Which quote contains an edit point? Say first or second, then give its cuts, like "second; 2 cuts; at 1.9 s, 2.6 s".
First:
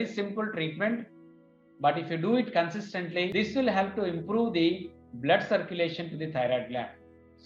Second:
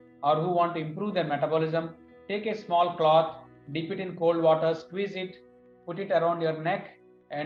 first; 1 cut; at 3.3 s